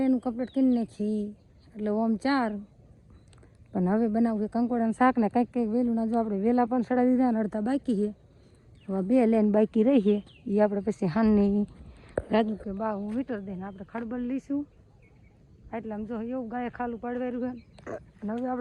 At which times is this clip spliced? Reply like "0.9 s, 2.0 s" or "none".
none